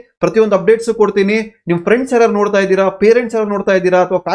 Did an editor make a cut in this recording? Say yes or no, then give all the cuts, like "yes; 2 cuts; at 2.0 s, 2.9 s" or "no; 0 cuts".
no; 0 cuts